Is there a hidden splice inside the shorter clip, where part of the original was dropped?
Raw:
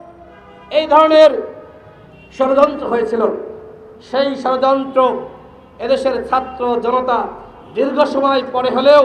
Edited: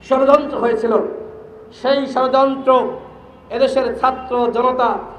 no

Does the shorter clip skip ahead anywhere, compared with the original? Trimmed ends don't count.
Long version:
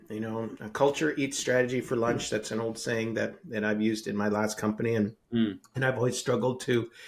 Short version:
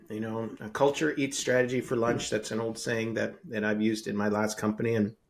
no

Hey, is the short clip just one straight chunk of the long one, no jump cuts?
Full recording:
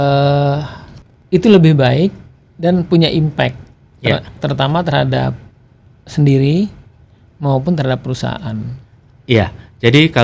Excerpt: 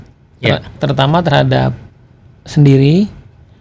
yes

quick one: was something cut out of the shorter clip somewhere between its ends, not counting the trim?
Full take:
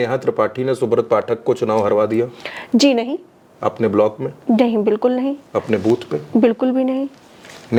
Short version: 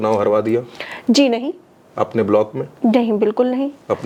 no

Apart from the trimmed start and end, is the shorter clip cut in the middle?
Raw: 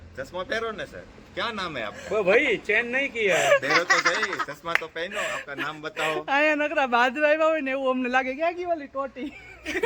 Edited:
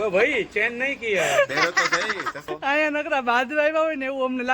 yes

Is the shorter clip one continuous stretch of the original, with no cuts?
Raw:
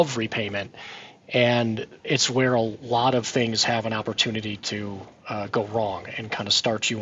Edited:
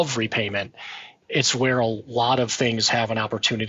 no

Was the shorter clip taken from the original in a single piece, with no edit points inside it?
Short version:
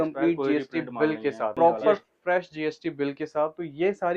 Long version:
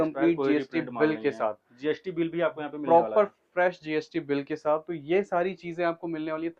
no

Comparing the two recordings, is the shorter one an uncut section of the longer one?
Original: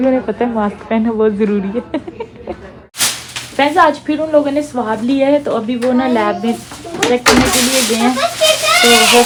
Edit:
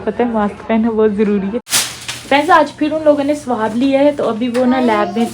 no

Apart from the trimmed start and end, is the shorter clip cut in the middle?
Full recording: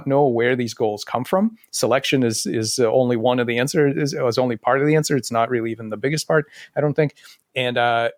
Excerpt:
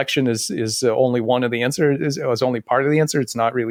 no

